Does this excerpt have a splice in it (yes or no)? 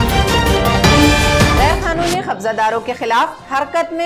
yes